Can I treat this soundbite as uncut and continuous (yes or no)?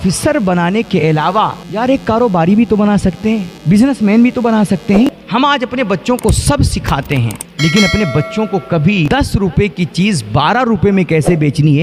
no